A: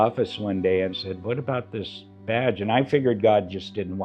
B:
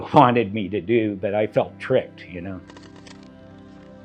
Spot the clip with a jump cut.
B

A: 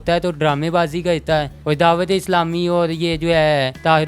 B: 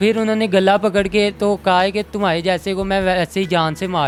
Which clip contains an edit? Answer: A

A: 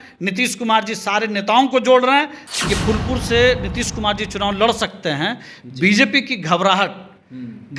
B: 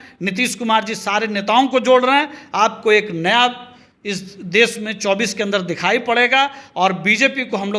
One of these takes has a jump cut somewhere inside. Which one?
A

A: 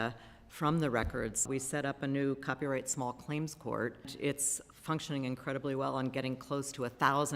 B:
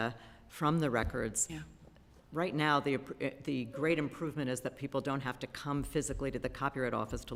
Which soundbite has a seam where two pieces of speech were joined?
A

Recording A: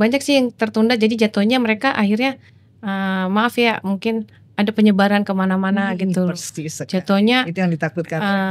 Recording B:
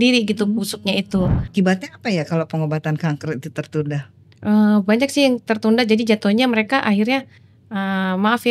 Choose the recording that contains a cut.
B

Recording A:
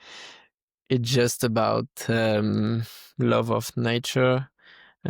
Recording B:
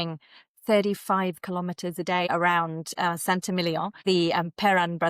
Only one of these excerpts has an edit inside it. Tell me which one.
B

